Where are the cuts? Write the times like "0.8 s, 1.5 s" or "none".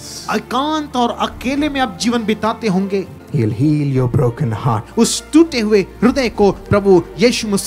3.1 s, 4.8 s

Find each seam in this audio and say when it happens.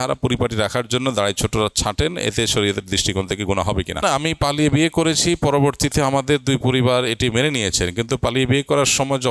3.9 s

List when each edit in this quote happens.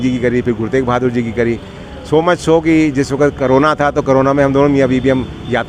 none

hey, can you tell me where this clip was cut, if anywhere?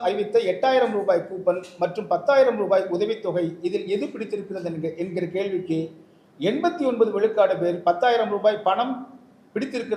none

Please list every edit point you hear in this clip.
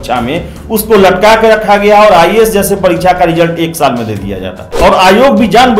4.8 s

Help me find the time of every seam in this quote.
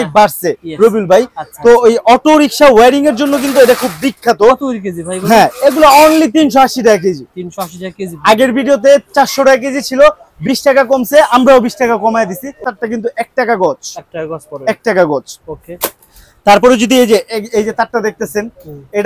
12.6 s

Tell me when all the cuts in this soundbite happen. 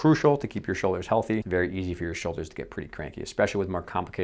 1.4 s

